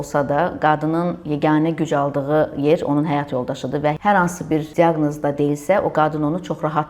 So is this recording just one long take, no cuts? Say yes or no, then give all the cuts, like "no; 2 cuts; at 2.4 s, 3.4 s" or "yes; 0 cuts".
no; 2 cuts; at 4.0 s, 4.7 s